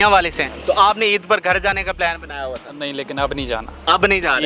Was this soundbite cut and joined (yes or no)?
no